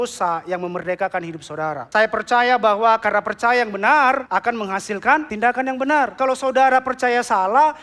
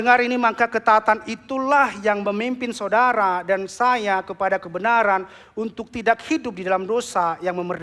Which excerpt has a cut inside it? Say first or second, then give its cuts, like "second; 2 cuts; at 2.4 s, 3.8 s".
first; 4 cuts; at 1.8 s, 4.2 s, 5.3 s, 6.1 s